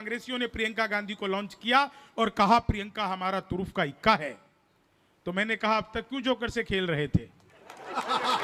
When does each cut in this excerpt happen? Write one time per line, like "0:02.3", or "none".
none